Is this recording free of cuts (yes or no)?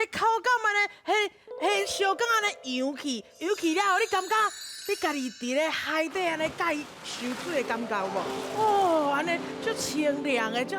yes